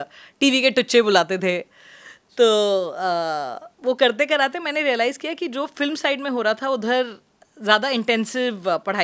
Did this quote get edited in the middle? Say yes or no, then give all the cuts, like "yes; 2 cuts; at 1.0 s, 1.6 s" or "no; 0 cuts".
no; 0 cuts